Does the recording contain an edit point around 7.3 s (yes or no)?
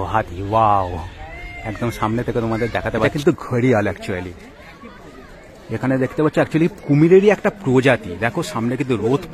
no